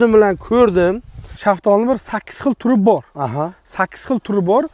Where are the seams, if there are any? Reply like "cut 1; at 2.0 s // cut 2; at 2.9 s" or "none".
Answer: cut 1; at 1.2 s